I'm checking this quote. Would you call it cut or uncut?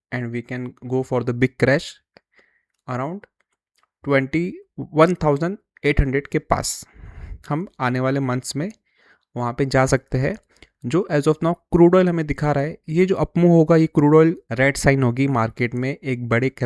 cut